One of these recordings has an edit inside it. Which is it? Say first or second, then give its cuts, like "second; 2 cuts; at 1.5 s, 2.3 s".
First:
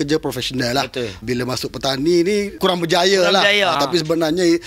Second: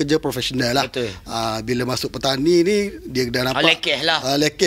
first; 3 cuts; at 1.2 s, 2.5 s, 3.8 s